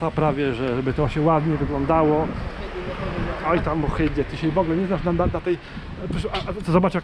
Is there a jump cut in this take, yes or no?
no